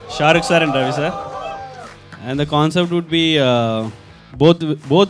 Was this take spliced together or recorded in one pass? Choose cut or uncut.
uncut